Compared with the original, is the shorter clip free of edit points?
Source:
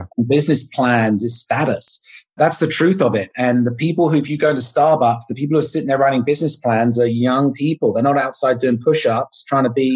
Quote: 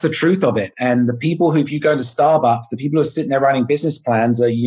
yes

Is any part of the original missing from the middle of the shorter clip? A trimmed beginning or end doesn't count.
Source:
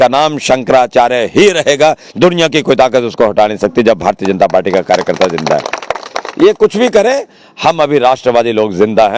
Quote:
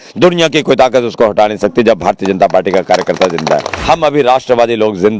yes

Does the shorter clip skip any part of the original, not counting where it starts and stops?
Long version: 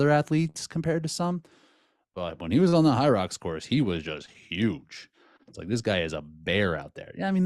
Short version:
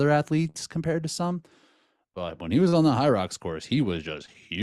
no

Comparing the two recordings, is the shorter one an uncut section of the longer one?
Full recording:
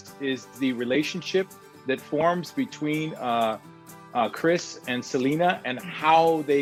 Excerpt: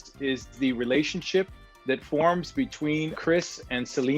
no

